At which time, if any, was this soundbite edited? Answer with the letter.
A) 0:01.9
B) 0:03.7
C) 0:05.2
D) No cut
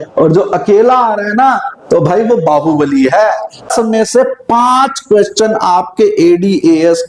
B